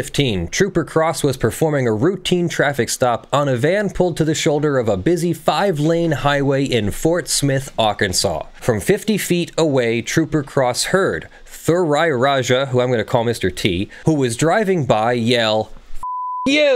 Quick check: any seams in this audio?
no; 0 cuts

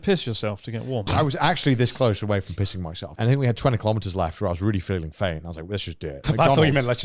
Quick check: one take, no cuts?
no; 3 cuts; at 1.1 s, 3.1 s, 6.2 s

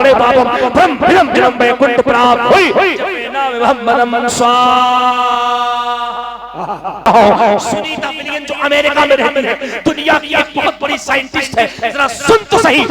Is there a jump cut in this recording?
yes; 1 cut; at 7.1 s

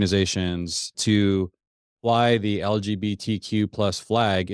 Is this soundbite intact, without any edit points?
no; 1 cut; at 0.9 s

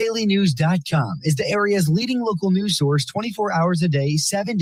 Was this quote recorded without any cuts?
yes; 0 cuts

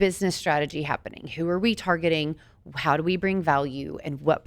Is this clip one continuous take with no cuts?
yes; 0 cuts

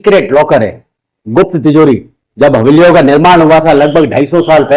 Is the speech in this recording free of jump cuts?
yes; 0 cuts

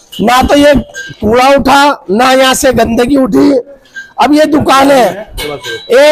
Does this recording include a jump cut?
no; 0 cuts

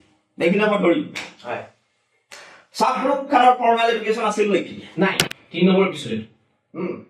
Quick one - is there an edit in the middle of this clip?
yes; 1 cut; at 5.2 s

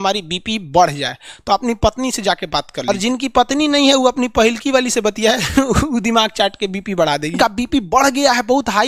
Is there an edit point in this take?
yes; 2 cuts; at 2.9 s, 7.3 s

